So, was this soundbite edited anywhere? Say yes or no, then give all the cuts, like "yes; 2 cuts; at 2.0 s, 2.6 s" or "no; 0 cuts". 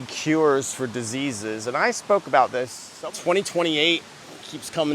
yes; 1 cut; at 2.8 s